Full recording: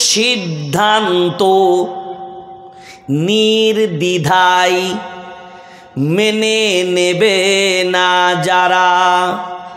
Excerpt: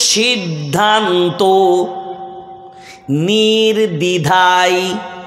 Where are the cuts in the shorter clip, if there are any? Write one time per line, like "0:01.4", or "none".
none